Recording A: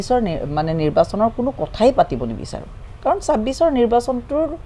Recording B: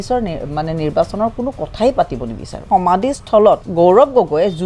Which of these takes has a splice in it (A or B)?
B